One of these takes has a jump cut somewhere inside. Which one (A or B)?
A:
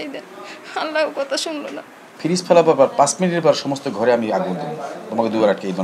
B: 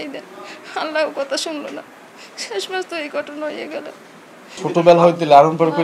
A